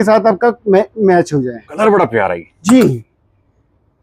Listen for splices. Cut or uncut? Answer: cut